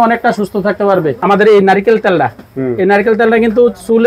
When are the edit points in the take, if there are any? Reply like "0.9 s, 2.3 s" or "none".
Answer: 1.1 s